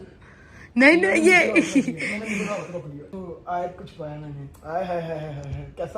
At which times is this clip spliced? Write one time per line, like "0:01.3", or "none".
0:03.1